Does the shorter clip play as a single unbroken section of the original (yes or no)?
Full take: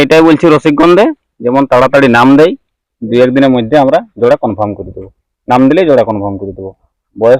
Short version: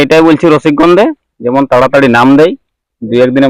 yes